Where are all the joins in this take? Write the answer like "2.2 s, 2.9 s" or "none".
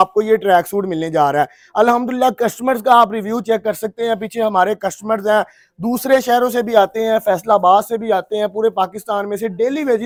none